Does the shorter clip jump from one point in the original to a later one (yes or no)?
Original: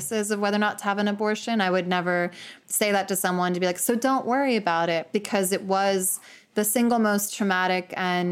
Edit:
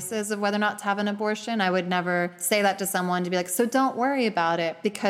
yes